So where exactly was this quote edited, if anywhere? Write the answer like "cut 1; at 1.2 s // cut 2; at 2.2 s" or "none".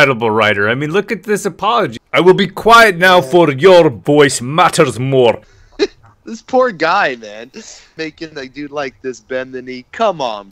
cut 1; at 1.9 s // cut 2; at 5.6 s